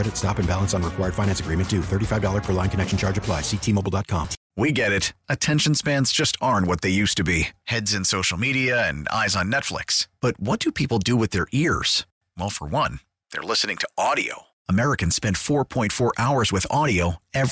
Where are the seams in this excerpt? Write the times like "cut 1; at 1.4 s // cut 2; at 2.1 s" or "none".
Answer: cut 1; at 4.4 s